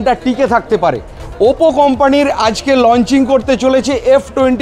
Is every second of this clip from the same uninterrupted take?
no; 1 cut; at 1.1 s

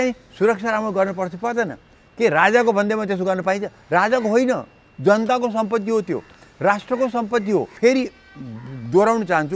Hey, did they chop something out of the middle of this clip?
yes; 1 cut; at 7.7 s

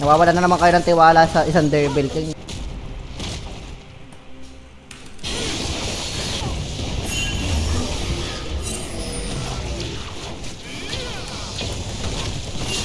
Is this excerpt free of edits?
yes; 0 cuts

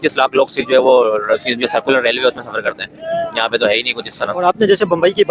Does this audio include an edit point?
yes; 1 cut; at 4.4 s

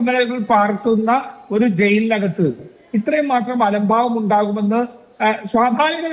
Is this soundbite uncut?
yes; 0 cuts

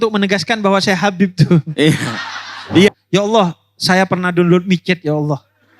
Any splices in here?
yes; 1 cut; at 2.9 s

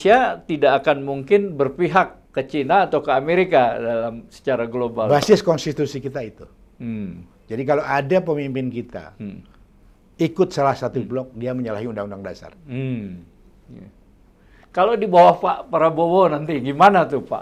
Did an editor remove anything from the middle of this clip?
no; 0 cuts

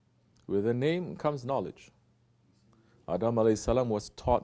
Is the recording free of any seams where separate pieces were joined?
no; 1 cut; at 1.3 s

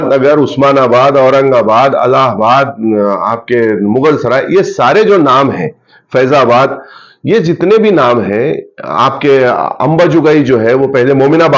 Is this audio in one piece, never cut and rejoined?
yes; 0 cuts

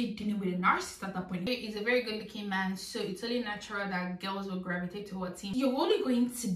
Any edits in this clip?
yes; 2 cuts; at 1.5 s, 5.5 s

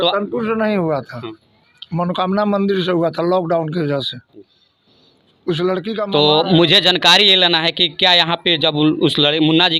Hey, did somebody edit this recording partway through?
no; 0 cuts

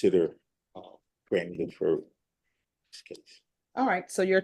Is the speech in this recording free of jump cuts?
no; 1 cut; at 1.5 s

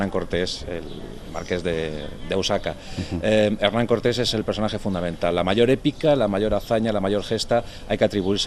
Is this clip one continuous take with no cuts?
no; 1 cut; at 6.3 s

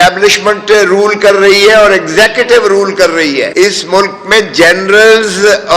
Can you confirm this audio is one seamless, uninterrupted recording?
no; 1 cut; at 3.5 s

